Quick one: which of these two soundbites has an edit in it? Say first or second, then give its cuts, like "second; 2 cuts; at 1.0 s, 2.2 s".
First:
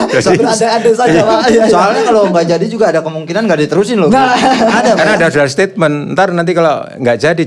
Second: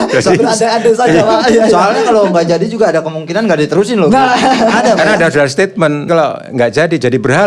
second; 1 cut; at 6.1 s